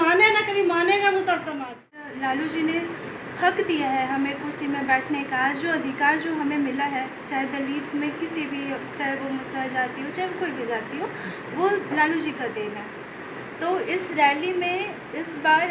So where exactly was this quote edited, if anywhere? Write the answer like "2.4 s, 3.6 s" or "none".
2.0 s